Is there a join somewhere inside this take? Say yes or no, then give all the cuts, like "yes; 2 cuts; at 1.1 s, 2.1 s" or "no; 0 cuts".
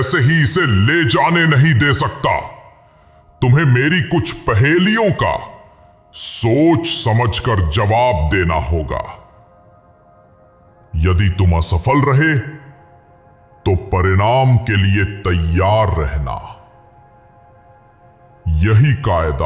no; 0 cuts